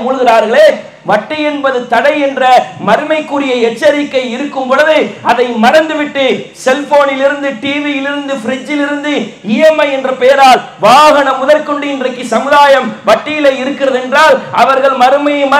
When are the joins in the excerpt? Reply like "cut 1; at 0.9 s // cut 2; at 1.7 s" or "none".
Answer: none